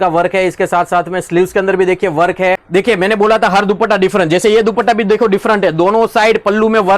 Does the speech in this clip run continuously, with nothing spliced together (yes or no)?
no